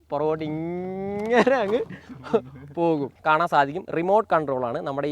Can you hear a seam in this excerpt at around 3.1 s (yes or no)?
yes